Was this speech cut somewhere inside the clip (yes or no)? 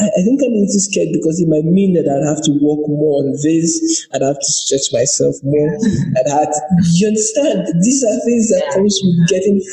no